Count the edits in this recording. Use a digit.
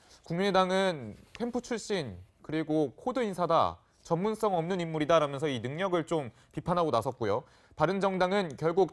1